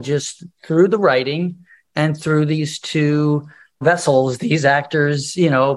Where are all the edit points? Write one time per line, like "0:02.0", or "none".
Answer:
0:03.8